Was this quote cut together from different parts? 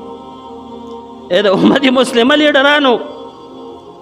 yes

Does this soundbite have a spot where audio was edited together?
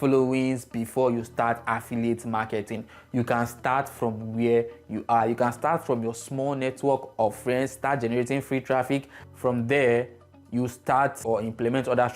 yes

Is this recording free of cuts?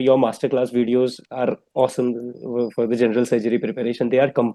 yes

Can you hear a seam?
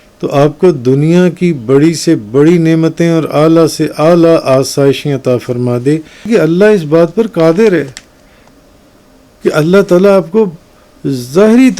yes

